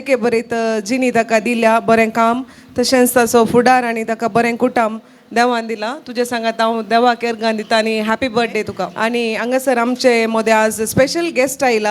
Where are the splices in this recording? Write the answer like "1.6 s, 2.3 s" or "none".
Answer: 8.8 s